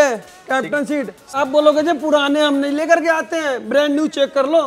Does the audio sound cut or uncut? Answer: cut